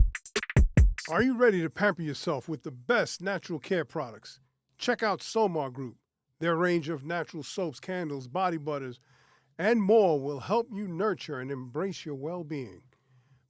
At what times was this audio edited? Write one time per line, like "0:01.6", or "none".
0:01.0